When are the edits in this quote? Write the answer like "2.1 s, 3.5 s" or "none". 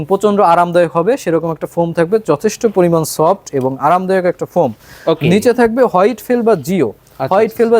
none